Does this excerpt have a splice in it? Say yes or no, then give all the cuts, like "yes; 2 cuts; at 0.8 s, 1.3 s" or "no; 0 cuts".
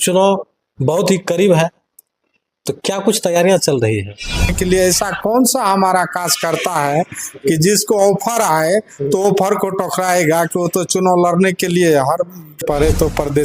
yes; 2 cuts; at 4.5 s, 12.6 s